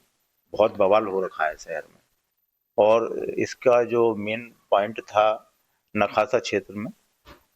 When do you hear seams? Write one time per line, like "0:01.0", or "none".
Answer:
0:03.3

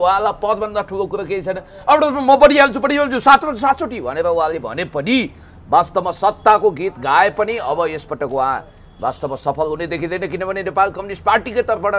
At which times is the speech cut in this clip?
none

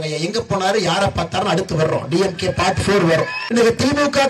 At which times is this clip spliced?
0:03.4

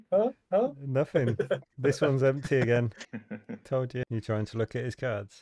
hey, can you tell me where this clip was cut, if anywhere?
0:04.1

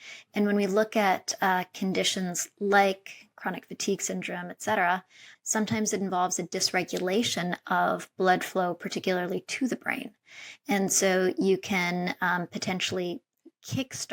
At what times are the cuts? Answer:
0:05.3

